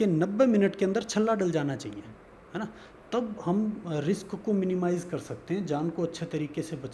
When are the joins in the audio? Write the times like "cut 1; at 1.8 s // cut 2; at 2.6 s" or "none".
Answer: none

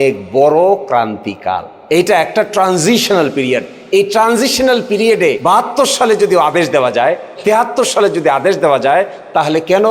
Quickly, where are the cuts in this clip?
cut 1; at 1.7 s // cut 2; at 5.4 s

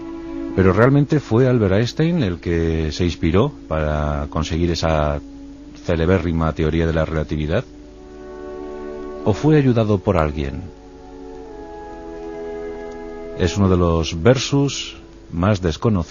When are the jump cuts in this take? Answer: cut 1; at 9.6 s

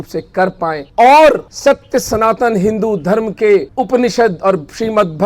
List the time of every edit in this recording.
cut 1; at 0.8 s // cut 2; at 1.5 s // cut 3; at 3.7 s

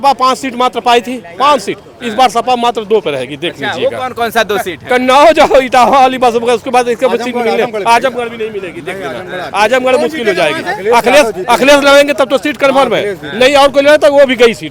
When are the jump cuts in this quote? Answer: none

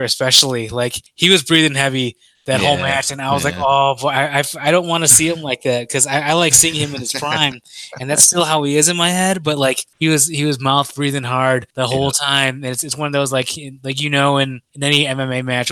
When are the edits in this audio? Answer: cut 1; at 1.0 s // cut 2; at 9.9 s // cut 3; at 11.7 s // cut 4; at 14.6 s

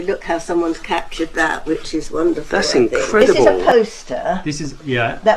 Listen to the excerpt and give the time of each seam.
cut 1; at 3.5 s

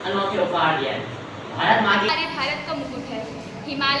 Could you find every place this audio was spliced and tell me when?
cut 1; at 2.1 s

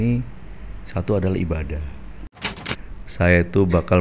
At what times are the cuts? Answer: cut 1; at 2.7 s

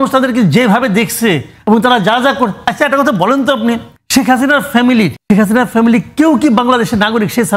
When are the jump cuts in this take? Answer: cut 1; at 3.9 s // cut 2; at 5.2 s

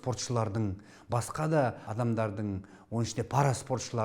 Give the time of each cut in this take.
cut 1; at 1.9 s

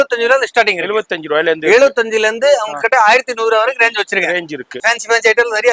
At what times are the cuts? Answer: cut 1; at 4.8 s

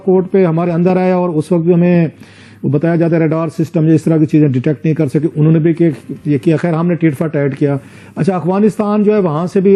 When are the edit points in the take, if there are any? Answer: none

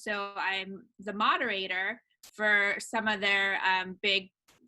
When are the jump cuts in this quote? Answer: none

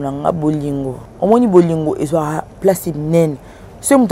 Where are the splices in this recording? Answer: cut 1; at 1.0 s

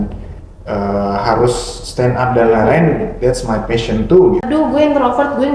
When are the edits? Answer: cut 1; at 4.5 s

